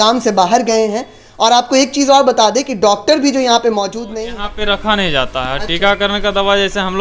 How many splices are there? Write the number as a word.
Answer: one